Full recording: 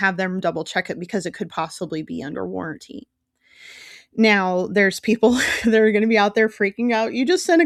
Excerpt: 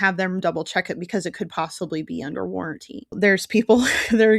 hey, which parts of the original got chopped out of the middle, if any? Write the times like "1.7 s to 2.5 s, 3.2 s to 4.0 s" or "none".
3.2 s to 4.7 s